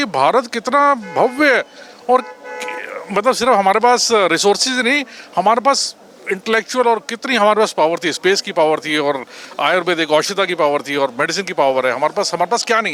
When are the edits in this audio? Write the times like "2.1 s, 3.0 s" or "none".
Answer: none